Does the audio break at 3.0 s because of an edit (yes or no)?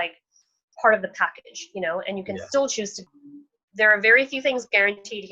yes